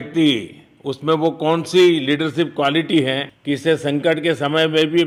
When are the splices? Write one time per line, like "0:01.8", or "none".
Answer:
none